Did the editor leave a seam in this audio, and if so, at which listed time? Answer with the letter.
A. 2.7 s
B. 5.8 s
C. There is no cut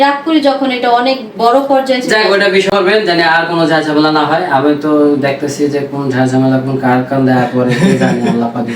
A